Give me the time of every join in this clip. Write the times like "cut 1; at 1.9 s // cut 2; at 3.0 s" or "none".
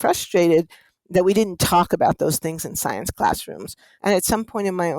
cut 1; at 3.8 s